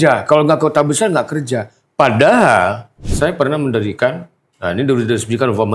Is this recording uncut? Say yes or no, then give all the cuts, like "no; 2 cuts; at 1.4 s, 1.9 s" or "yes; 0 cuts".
no; 1 cut; at 3.0 s